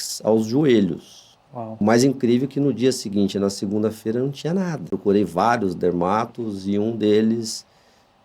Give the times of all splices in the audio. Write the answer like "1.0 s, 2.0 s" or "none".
1.8 s, 4.9 s